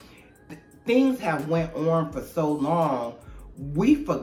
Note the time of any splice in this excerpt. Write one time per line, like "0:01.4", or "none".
none

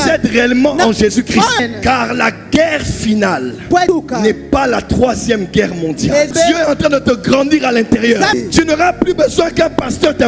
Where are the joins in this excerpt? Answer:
0:06.3
0:08.3

